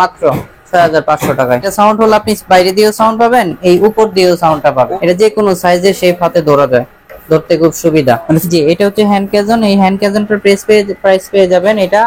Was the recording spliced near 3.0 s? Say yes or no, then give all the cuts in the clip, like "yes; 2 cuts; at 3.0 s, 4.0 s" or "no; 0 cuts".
no; 3 cuts; at 1.7 s, 4.7 s, 8.4 s